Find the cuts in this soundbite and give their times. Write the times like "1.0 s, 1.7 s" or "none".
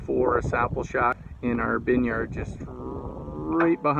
1.2 s